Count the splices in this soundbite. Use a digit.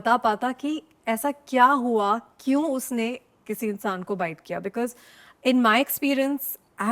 0